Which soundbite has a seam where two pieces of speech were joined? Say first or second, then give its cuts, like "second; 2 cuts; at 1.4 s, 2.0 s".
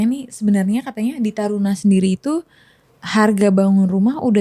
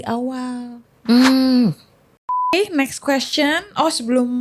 second; 1 cut; at 2.5 s